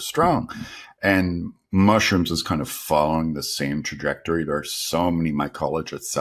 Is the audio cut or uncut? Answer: uncut